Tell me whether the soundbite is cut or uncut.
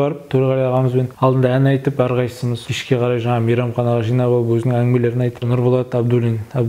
cut